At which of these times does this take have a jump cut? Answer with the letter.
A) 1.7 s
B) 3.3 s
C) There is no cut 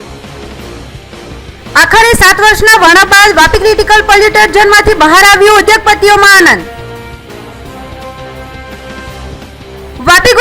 A